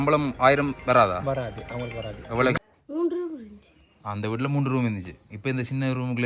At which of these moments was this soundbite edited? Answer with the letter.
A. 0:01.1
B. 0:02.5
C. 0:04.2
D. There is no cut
B